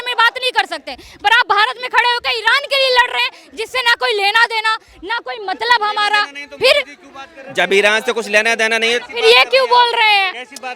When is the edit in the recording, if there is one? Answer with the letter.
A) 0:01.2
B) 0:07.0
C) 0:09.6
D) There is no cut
D